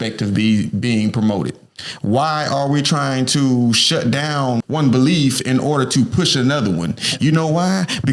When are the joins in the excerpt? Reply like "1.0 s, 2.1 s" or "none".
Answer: 4.6 s